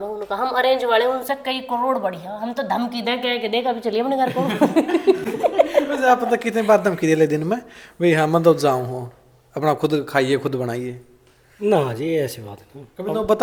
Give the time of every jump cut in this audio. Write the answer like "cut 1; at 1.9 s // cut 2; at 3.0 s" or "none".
none